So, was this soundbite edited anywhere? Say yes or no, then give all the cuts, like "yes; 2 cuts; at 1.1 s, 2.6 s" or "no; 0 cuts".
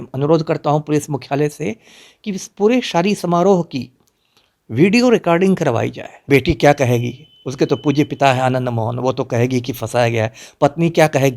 yes; 1 cut; at 6.3 s